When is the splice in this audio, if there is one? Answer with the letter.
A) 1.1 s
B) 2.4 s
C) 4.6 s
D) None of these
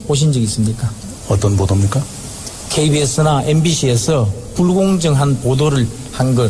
A